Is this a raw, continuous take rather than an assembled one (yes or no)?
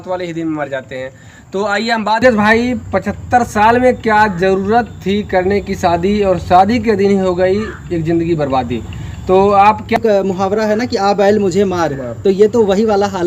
no